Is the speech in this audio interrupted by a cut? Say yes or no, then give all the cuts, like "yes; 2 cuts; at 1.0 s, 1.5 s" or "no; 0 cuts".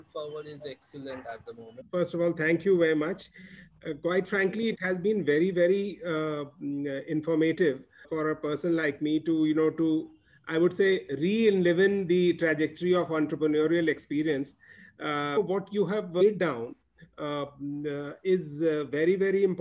yes; 2 cuts; at 1.8 s, 8.0 s